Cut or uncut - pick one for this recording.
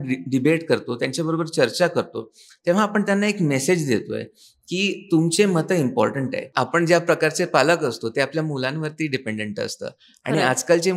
cut